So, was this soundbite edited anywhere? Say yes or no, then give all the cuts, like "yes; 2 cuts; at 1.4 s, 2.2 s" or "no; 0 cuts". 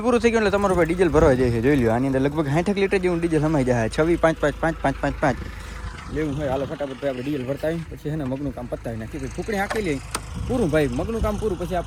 no; 0 cuts